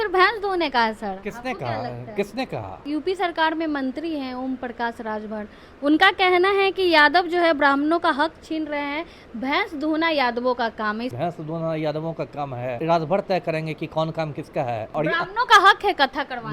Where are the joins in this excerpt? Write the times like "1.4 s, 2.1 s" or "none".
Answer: 2.8 s, 11.1 s, 12.8 s, 14.9 s